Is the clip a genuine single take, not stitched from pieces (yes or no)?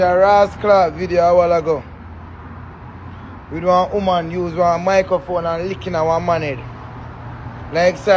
yes